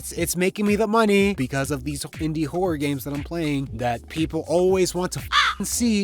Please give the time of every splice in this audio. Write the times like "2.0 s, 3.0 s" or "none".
1.4 s, 3.7 s